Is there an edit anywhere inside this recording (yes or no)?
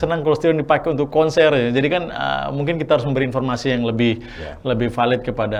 no